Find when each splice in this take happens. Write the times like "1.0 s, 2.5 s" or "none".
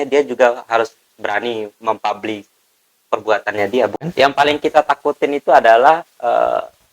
4.1 s